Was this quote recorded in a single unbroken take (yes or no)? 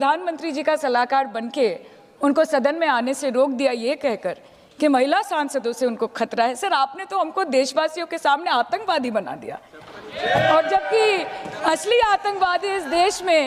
yes